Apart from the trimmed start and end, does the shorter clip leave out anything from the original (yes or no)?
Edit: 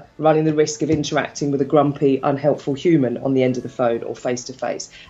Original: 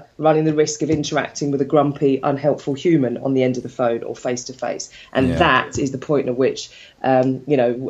no